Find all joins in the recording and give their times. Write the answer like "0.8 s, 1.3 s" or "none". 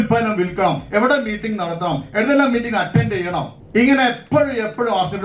3.6 s